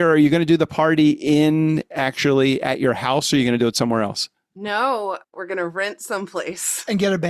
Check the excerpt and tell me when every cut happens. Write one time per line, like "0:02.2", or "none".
0:05.3